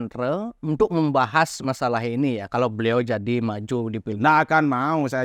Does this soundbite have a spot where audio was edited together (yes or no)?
no